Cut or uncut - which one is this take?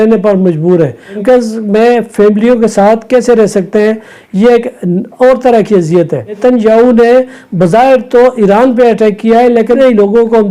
cut